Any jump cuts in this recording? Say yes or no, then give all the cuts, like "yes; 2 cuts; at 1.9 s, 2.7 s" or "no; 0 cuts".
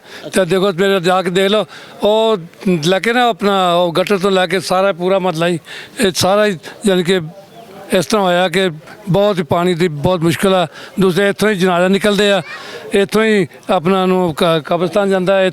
no; 0 cuts